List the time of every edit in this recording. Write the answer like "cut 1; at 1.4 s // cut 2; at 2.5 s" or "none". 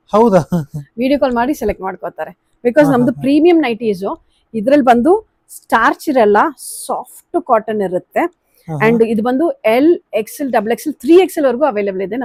none